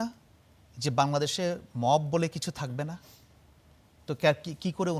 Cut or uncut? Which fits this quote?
uncut